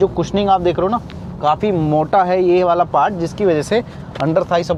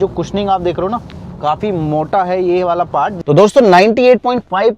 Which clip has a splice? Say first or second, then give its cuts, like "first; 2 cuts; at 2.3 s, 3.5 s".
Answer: second; 1 cut; at 3.2 s